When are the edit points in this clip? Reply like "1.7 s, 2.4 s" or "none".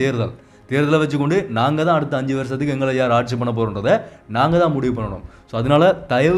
none